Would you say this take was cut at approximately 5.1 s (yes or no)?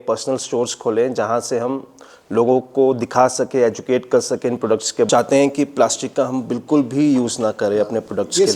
yes